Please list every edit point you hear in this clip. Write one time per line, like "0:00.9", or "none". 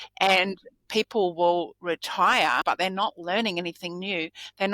0:02.6